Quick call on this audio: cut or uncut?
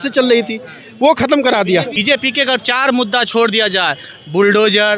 cut